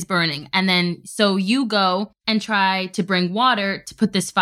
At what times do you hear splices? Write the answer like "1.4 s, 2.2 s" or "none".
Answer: 2.2 s